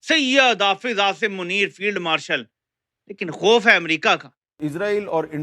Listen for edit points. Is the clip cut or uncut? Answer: cut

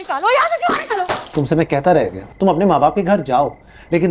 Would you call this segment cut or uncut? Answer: cut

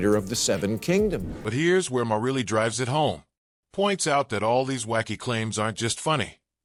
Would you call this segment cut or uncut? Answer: uncut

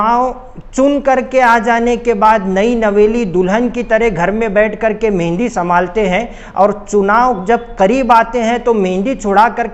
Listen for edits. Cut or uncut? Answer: uncut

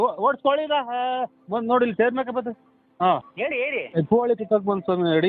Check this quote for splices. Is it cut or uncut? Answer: cut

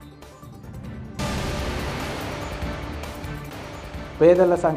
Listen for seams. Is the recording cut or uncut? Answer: cut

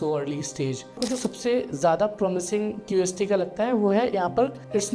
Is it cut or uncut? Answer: cut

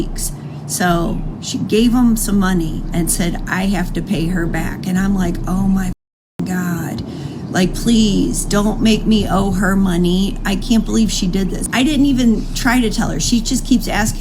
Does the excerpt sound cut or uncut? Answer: uncut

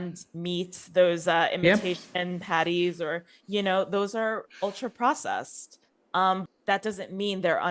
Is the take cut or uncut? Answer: cut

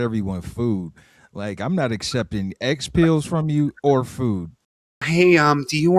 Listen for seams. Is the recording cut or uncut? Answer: uncut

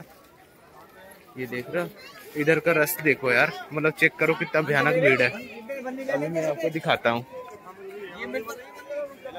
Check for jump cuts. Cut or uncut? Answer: uncut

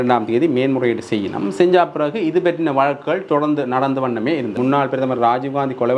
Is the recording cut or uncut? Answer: cut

